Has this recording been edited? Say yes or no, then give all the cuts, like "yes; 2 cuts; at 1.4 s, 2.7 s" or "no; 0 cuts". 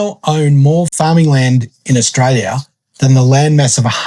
yes; 1 cut; at 0.9 s